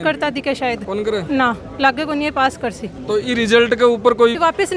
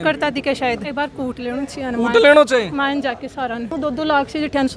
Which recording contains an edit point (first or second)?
second